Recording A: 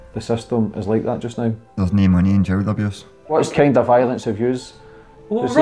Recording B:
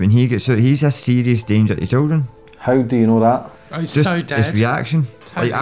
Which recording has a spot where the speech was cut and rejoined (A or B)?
A